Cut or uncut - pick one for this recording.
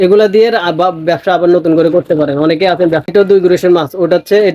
cut